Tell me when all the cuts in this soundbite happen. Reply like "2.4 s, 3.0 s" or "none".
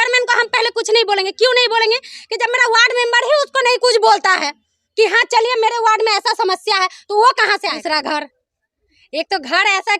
7.8 s